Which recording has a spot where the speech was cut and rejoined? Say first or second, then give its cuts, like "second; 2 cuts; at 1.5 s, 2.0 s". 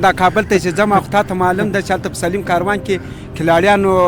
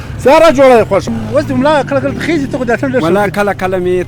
second; 1 cut; at 1.1 s